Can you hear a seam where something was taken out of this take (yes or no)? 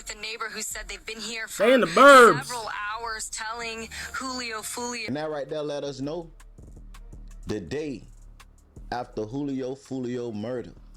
yes